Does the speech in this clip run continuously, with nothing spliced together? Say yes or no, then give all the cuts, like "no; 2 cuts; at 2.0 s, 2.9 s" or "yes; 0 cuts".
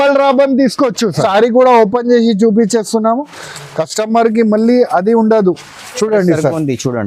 yes; 0 cuts